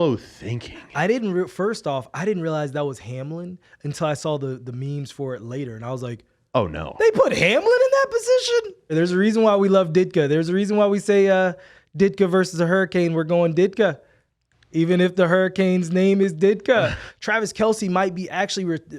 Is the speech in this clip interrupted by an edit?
yes; 2 cuts; at 8.9 s, 17.1 s

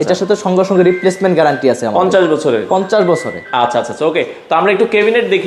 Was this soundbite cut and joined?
no; 0 cuts

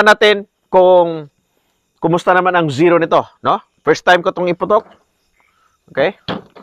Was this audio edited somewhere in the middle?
no; 0 cuts

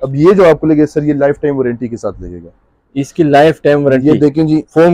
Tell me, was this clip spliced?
no; 0 cuts

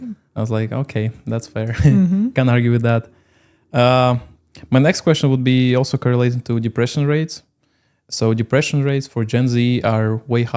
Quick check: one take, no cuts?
yes; 0 cuts

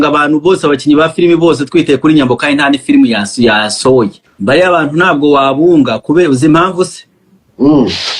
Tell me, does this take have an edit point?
yes; 1 cut; at 4.3 s

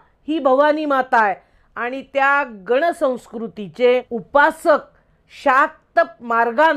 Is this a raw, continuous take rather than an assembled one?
no; 1 cut; at 4.2 s

